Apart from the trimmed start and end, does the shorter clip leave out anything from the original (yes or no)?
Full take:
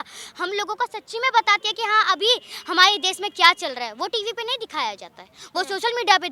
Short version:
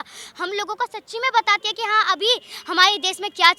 no